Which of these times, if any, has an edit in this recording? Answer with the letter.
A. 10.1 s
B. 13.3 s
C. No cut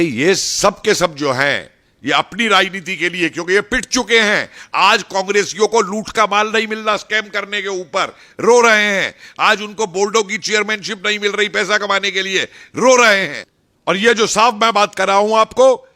B